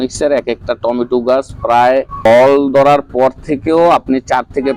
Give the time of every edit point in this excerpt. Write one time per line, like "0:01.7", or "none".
0:02.1